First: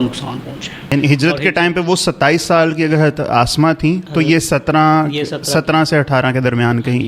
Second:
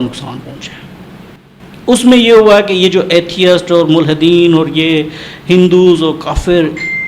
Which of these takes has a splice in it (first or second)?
first